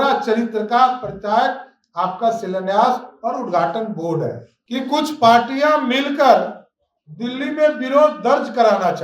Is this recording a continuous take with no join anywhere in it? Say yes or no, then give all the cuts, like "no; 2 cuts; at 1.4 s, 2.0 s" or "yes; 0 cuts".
no; 1 cut; at 4.5 s